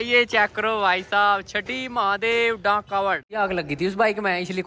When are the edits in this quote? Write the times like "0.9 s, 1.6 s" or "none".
3.2 s